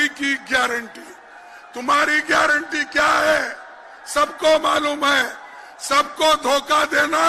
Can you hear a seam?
no; 0 cuts

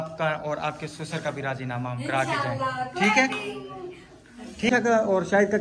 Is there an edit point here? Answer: yes; 1 cut; at 4.7 s

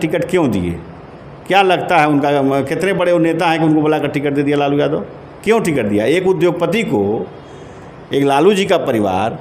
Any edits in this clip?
no; 0 cuts

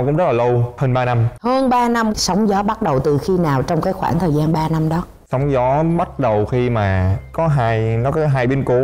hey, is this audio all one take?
yes; 0 cuts

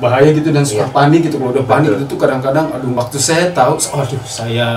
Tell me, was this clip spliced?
yes; 1 cut; at 2.9 s

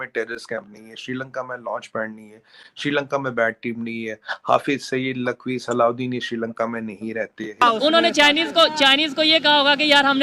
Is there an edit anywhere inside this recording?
yes; 1 cut; at 7.6 s

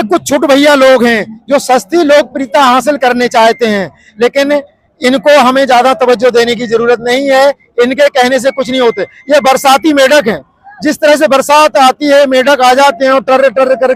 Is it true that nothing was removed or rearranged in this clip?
yes; 0 cuts

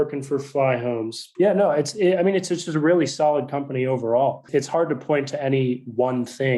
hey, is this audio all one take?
no; 2 cuts; at 1.2 s, 4.5 s

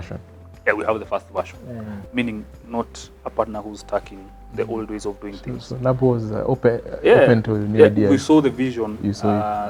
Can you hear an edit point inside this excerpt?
yes; 1 cut; at 1.9 s

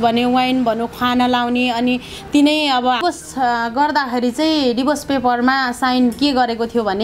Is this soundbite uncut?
no; 1 cut; at 3.0 s

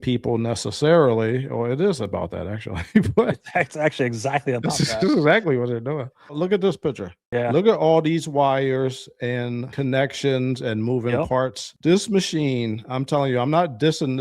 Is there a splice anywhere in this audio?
yes; 1 cut; at 6.2 s

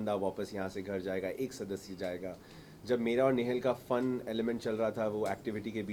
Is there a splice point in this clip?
no; 0 cuts

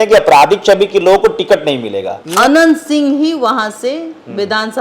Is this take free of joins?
no; 1 cut; at 2.2 s

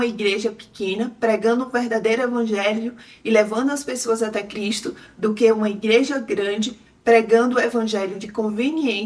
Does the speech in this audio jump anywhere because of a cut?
no; 0 cuts

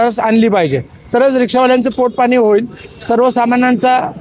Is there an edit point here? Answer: no; 0 cuts

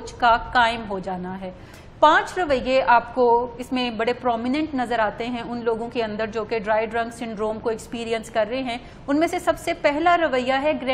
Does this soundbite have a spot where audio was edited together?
yes; 1 cut; at 1.6 s

